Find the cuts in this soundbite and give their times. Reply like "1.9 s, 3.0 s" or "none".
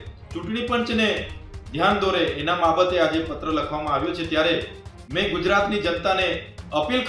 none